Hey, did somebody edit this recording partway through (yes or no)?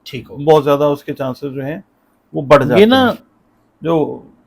yes